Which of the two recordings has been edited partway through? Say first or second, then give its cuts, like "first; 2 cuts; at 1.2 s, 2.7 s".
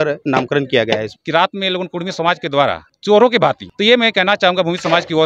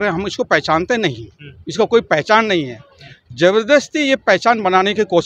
first; 3 cuts; at 1.2 s, 2.9 s, 3.7 s